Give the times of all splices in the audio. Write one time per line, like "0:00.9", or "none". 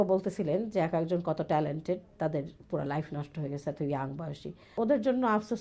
0:04.7